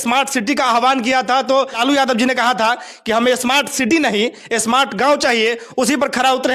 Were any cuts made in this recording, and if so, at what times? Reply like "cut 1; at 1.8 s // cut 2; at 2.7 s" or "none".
cut 1; at 1.8 s